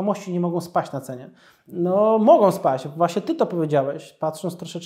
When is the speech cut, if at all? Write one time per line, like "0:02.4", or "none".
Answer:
none